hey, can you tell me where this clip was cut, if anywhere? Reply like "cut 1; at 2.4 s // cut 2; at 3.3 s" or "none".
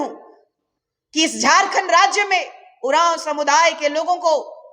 none